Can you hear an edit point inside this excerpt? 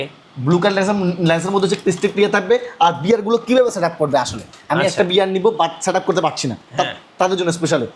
no; 0 cuts

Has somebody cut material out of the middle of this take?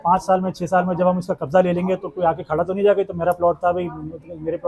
no; 0 cuts

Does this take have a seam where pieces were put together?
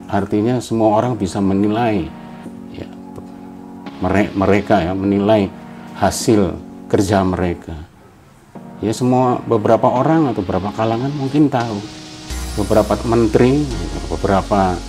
no; 0 cuts

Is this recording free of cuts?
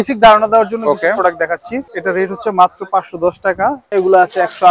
no; 2 cuts; at 1.9 s, 3.9 s

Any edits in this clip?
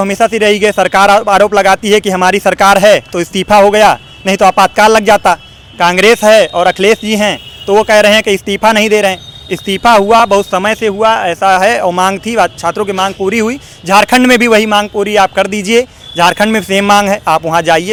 no; 0 cuts

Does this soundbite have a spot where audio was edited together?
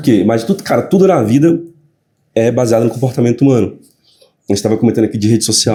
no; 0 cuts

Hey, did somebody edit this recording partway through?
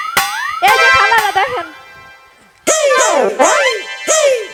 no; 0 cuts

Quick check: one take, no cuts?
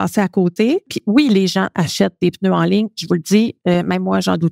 no; 1 cut; at 0.9 s

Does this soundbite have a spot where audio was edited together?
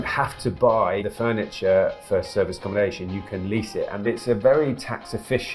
yes; 2 cuts; at 1.0 s, 4.1 s

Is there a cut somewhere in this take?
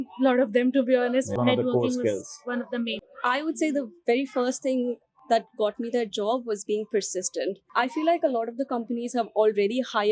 yes; 3 cuts; at 1.3 s, 3.1 s, 7.6 s

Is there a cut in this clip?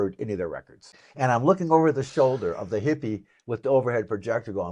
yes; 1 cut; at 1.3 s

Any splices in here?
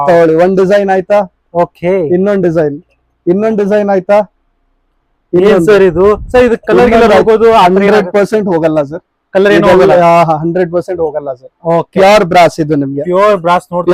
no; 0 cuts

